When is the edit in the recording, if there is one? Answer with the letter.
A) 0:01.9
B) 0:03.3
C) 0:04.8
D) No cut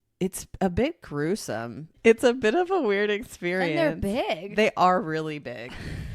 A